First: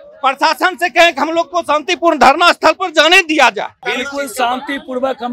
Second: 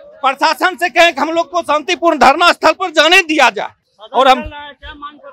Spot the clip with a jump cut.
first; 1 cut; at 3.8 s

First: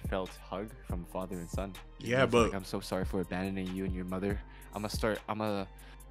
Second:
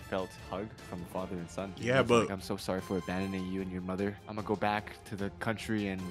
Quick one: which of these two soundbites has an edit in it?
second; 2 cuts; at 1.7 s, 4.3 s

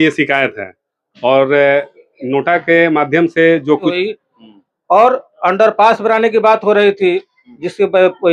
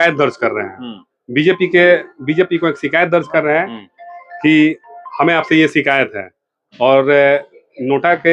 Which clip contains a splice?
first; 1 cut; at 3.9 s

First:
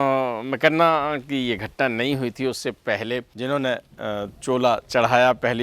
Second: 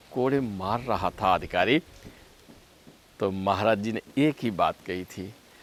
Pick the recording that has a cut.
first; 1 cut; at 3.3 s

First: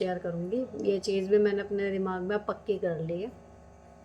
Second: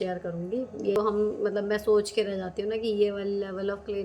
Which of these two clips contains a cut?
second; 1 cut; at 1.0 s

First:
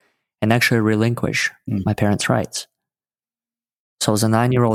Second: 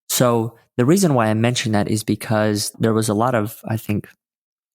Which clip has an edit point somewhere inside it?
second; 1 cut; at 2.7 s

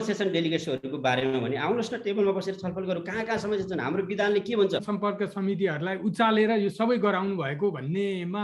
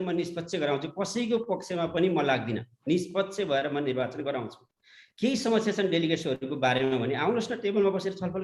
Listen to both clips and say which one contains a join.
first; 1 cut; at 4.8 s

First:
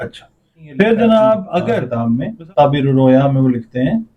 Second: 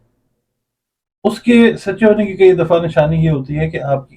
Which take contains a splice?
first; 1 cut; at 1.9 s

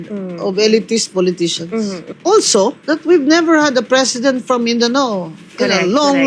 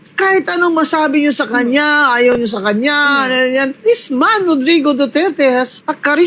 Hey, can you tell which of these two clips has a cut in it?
first; 1 cut; at 2.1 s

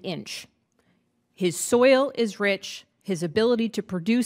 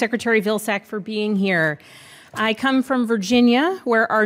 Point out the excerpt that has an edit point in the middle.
second; 1 cut; at 1.9 s

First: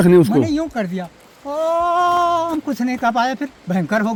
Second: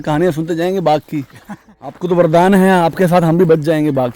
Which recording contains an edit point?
second; 1 cut; at 1.7 s

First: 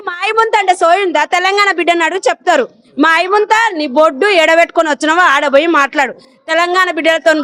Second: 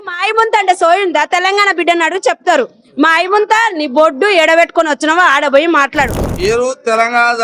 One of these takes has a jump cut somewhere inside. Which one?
second; 1 cut; at 6.2 s

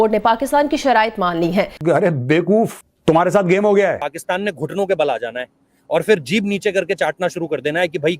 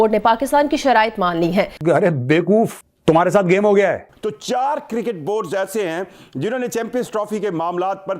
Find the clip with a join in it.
first; 1 cut; at 4.1 s

